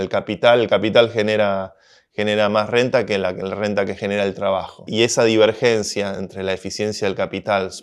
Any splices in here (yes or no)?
yes